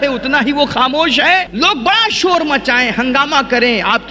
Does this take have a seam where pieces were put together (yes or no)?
yes